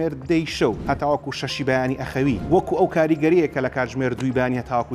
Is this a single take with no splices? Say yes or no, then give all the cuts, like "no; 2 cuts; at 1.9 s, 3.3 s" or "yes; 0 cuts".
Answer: no; 2 cuts; at 0.8 s, 2.4 s